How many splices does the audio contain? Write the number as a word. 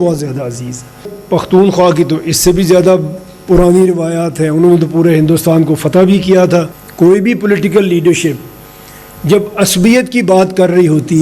two